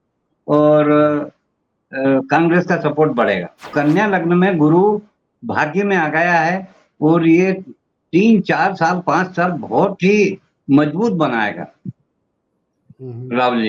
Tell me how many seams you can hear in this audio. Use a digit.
1